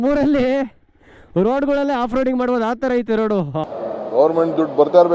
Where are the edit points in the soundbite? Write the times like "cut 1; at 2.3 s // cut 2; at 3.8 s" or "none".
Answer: cut 1; at 3.7 s